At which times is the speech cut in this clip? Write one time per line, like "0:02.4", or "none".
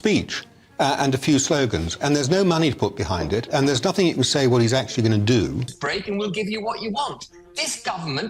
0:05.8

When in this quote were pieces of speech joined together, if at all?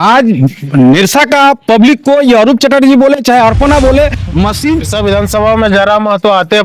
0:04.9

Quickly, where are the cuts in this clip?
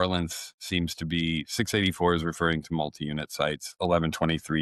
none

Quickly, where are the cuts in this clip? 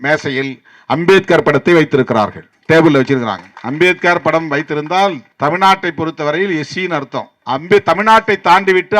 0:03.5
0:05.3
0:07.3

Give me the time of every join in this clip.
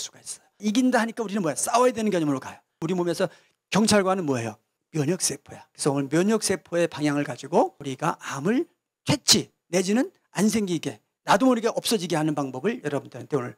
0:02.8
0:07.8

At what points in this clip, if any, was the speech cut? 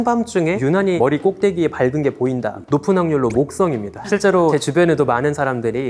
0:00.8
0:02.6
0:04.4

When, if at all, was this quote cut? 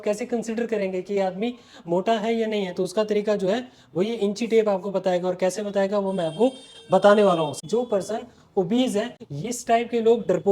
0:07.6
0:09.1

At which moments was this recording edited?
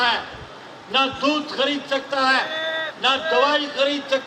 none

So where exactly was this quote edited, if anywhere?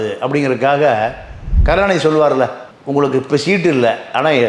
0:01.6

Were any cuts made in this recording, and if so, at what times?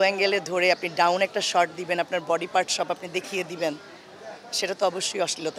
none

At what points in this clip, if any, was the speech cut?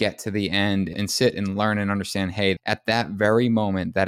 0:00.9
0:02.6

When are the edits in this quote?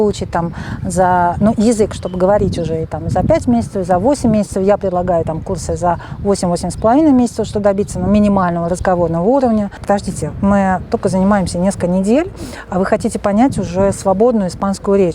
0:09.8

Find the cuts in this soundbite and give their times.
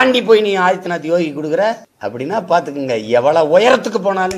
0:01.9

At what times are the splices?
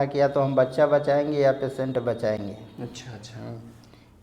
none

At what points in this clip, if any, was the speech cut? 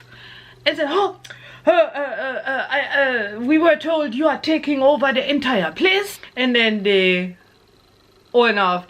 0:06.2

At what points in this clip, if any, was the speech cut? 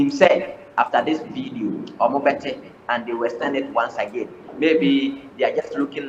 none

